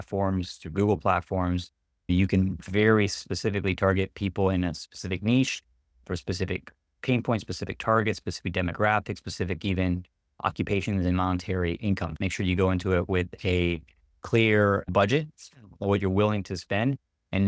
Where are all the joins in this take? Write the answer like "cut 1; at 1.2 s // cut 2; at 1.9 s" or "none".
cut 1; at 12.1 s // cut 2; at 14.9 s